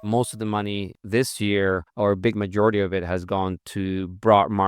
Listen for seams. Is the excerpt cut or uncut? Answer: cut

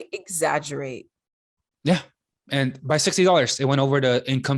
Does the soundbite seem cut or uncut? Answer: uncut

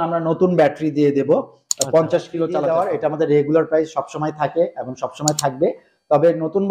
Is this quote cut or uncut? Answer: cut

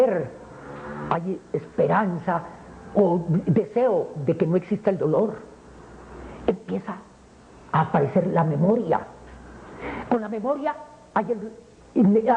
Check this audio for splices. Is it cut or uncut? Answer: cut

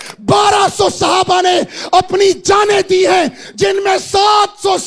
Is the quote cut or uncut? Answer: uncut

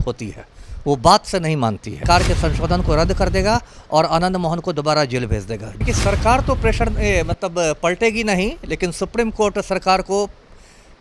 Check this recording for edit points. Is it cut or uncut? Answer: cut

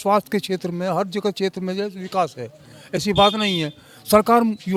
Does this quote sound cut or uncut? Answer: uncut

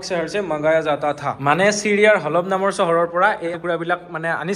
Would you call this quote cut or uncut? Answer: cut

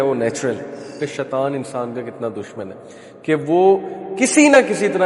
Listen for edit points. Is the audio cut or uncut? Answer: cut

